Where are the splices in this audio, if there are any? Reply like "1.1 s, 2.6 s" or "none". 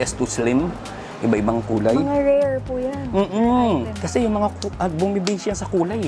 none